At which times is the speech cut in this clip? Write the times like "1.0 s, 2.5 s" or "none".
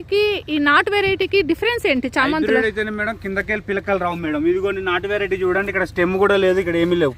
none